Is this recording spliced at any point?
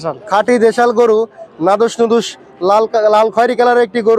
no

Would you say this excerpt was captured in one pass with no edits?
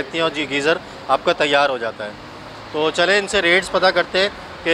yes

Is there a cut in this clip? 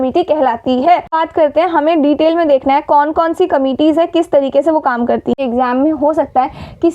yes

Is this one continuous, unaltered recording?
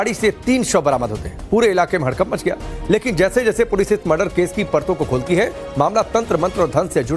yes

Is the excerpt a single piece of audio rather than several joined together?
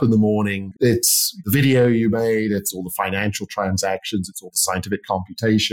no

